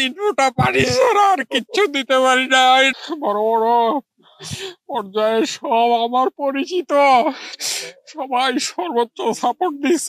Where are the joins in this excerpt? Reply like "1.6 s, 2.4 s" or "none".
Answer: 2.9 s

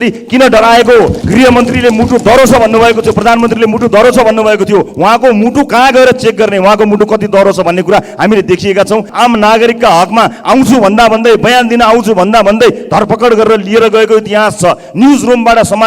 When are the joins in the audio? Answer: 1.2 s, 9.1 s

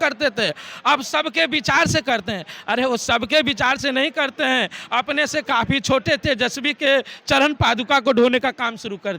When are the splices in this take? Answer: none

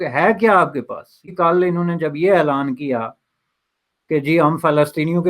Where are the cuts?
1.3 s

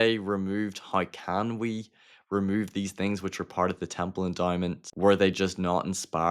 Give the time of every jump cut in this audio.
4.8 s

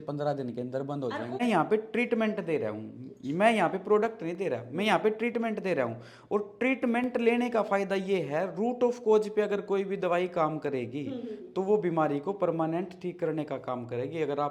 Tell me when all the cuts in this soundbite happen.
1.4 s

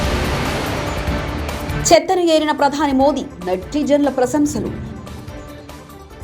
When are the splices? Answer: 1.8 s

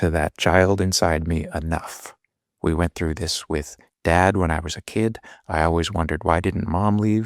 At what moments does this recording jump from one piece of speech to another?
none

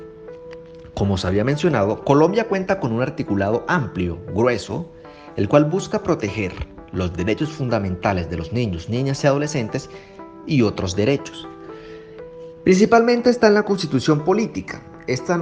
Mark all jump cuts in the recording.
0.9 s, 11.2 s, 12.6 s

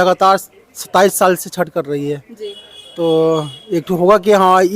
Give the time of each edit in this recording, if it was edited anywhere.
none

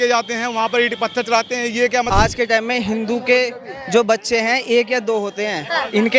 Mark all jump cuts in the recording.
2.1 s

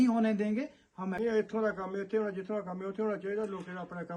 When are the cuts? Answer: 1.0 s

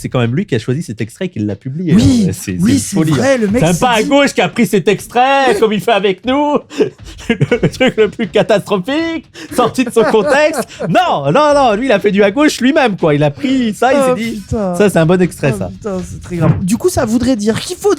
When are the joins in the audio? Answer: 16.6 s

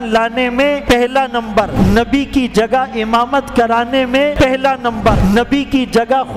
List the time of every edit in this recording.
0.8 s, 1.7 s, 4.3 s, 5.2 s

